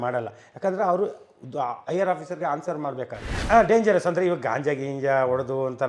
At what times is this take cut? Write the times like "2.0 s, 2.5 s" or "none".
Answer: 3.3 s